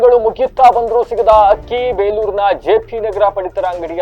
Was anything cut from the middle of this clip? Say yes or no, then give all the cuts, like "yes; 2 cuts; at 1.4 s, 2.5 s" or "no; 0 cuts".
no; 0 cuts